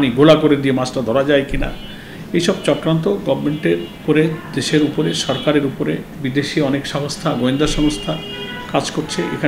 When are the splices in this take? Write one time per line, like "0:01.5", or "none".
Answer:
0:04.0
0:06.1